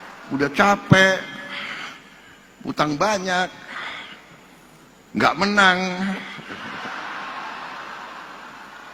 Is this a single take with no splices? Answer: yes; 0 cuts

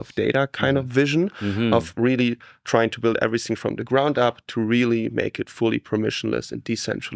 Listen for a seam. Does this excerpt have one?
no; 0 cuts

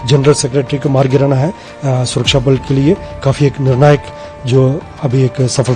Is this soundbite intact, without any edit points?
yes; 0 cuts

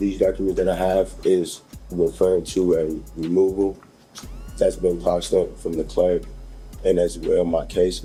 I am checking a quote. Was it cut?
no; 0 cuts

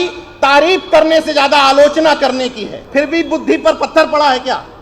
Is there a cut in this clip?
yes; 1 cut; at 2.7 s

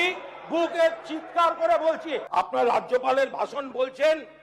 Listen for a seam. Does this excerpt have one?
yes; 1 cut; at 2.2 s

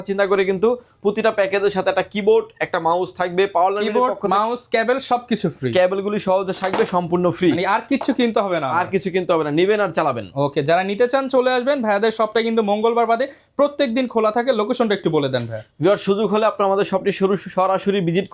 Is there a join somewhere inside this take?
no; 0 cuts

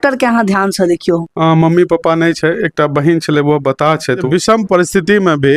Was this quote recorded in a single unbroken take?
no; 2 cuts; at 1.3 s, 4.2 s

